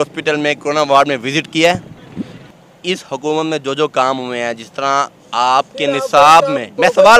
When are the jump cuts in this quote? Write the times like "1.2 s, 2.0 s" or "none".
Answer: 2.4 s